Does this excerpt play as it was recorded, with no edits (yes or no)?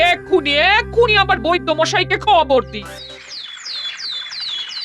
no